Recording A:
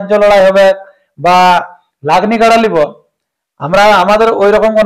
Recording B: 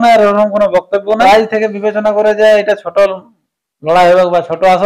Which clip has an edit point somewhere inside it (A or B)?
B